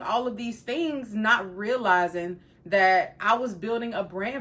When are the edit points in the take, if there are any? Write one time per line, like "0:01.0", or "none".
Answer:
none